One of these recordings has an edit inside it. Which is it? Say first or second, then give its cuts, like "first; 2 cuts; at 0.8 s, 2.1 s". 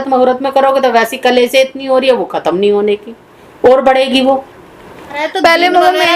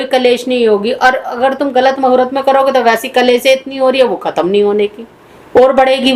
first; 1 cut; at 5.2 s